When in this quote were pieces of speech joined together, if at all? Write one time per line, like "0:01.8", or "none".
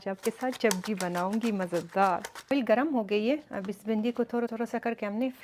0:02.3